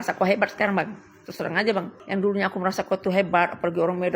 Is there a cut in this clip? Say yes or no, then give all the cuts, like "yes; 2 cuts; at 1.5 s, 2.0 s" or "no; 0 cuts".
yes; 1 cut; at 2.0 s